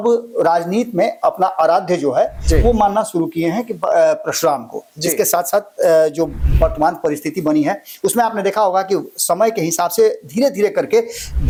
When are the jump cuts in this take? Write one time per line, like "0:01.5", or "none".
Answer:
none

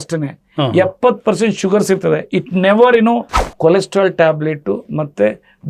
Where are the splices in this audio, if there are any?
0:03.3

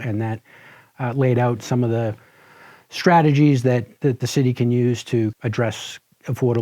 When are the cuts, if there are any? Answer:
0:05.4

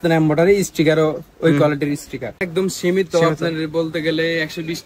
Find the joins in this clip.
0:02.5

